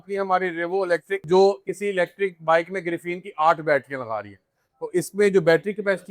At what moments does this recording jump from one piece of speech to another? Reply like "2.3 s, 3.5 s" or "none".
1.2 s